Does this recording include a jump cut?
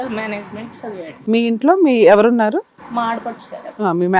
yes; 2 cuts; at 1.1 s, 2.8 s

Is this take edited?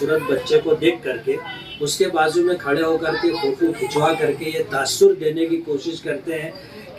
no; 0 cuts

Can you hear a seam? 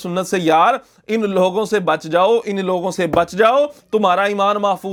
no; 0 cuts

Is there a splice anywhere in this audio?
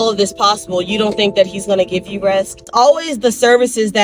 yes; 1 cut; at 2.7 s

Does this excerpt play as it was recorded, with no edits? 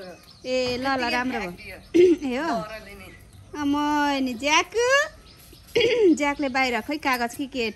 yes; 0 cuts

